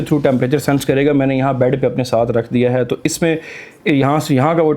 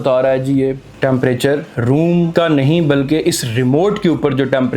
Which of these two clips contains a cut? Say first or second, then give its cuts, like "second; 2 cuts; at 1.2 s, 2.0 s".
second; 2 cuts; at 0.9 s, 2.3 s